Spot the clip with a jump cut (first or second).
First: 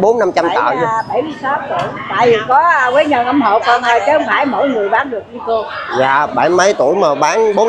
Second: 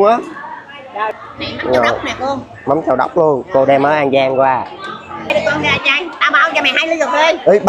second